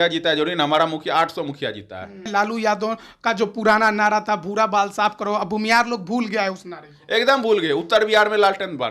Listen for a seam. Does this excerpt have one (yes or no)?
yes